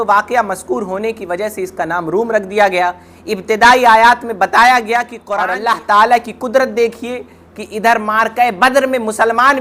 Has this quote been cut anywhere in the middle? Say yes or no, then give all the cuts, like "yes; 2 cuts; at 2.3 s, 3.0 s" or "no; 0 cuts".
yes; 1 cut; at 5.2 s